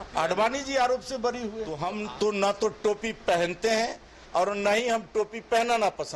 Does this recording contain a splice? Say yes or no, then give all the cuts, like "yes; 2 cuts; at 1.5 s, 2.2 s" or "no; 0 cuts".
yes; 1 cut; at 1.8 s